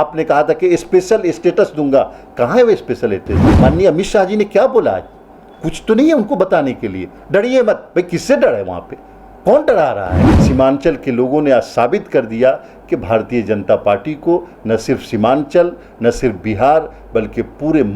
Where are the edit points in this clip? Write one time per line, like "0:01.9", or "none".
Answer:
0:03.4
0:10.3